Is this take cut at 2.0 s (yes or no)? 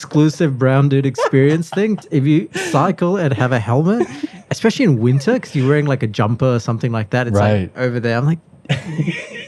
yes